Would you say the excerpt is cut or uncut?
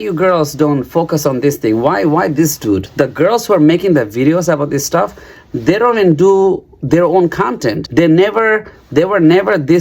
cut